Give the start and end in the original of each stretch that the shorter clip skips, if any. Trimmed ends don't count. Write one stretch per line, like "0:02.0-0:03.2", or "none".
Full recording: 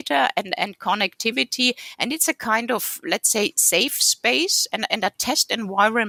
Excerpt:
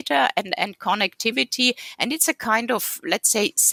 none